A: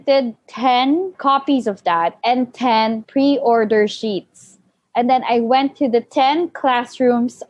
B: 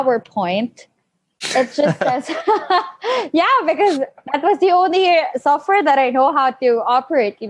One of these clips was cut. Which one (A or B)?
A